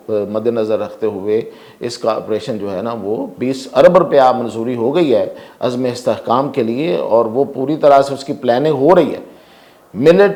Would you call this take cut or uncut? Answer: uncut